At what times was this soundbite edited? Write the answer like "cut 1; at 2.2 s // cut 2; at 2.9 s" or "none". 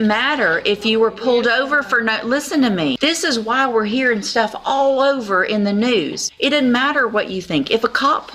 cut 1; at 3.0 s // cut 2; at 6.2 s